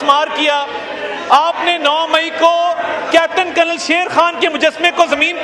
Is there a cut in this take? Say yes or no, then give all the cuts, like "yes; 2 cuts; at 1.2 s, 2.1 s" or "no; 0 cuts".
no; 0 cuts